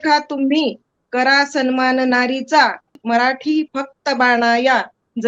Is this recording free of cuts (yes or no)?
no